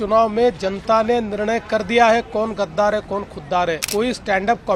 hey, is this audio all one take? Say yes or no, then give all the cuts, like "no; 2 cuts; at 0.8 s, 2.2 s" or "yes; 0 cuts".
no; 1 cut; at 3.8 s